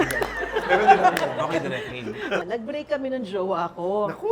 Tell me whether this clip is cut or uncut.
cut